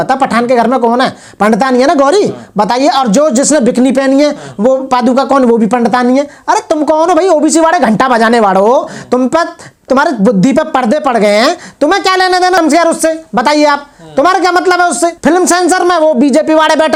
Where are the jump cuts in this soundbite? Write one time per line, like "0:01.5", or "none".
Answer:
none